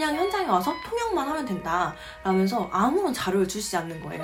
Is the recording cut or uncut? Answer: uncut